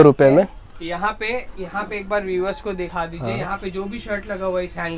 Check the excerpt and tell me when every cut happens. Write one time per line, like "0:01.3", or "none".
none